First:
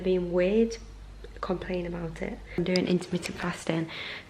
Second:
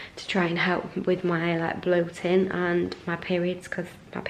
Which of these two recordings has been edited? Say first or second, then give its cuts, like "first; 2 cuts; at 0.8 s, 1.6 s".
first; 1 cut; at 2.6 s